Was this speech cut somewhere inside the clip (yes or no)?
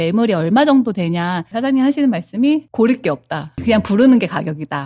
yes